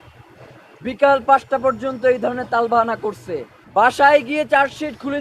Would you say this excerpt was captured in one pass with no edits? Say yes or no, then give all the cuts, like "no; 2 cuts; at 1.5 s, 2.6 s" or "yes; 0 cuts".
no; 1 cut; at 3.5 s